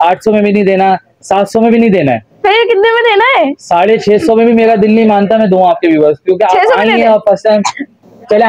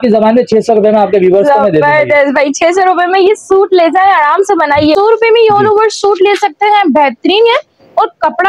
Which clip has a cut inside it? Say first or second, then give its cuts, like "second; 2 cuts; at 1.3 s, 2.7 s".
second; 1 cut; at 4.9 s